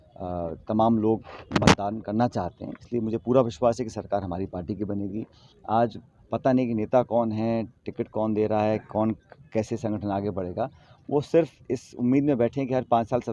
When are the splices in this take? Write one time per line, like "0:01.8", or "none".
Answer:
0:05.5